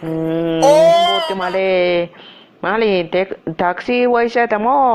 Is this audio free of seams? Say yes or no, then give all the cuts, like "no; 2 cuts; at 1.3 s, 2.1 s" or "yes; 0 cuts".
no; 1 cut; at 1.3 s